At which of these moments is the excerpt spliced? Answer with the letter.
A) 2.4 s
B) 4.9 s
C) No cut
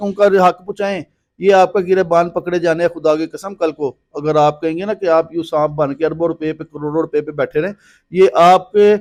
C